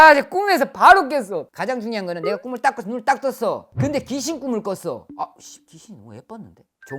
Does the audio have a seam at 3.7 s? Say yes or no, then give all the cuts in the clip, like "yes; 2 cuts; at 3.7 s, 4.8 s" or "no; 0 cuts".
no; 2 cuts; at 1.5 s, 5.1 s